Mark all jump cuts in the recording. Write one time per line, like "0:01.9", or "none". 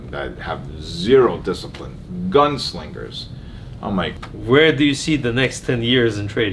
0:04.2